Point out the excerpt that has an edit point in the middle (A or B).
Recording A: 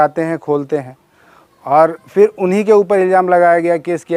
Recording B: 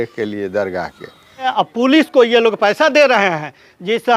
B